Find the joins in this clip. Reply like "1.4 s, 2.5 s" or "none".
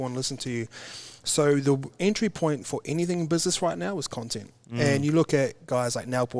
none